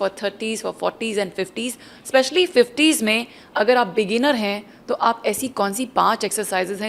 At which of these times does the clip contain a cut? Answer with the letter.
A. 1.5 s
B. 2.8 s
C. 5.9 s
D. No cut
D